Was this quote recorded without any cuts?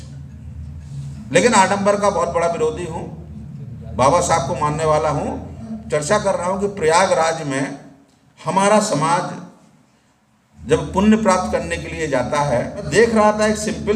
no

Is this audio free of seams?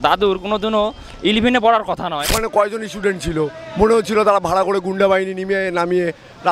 no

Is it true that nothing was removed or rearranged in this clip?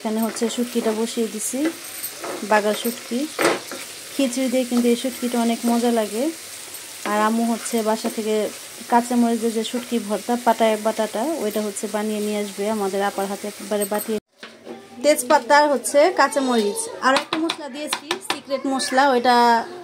no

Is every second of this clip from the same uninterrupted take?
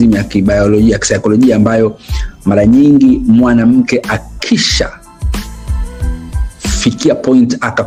yes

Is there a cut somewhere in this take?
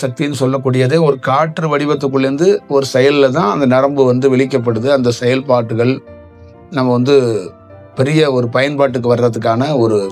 no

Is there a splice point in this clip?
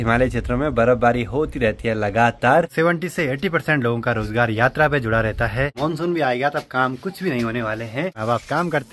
yes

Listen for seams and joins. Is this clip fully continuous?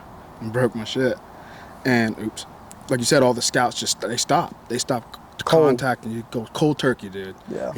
yes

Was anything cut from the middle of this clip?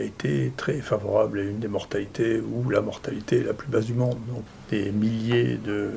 yes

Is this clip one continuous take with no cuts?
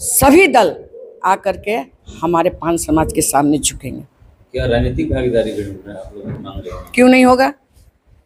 yes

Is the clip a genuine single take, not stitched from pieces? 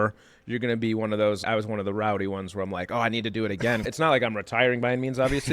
no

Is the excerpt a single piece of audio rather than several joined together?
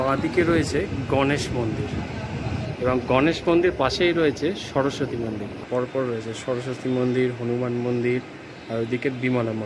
no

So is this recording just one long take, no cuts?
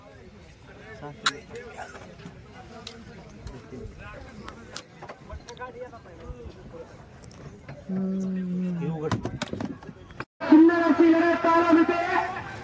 yes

